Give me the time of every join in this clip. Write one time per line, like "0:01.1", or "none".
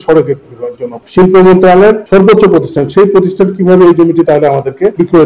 0:00.9